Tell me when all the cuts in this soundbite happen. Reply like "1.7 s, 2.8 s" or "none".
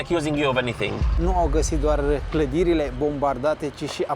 1.1 s